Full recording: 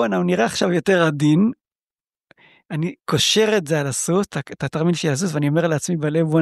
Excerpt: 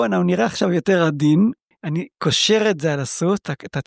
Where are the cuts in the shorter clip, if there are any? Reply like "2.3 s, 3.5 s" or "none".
1.7 s